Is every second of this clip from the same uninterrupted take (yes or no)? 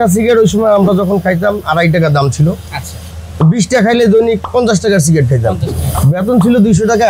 no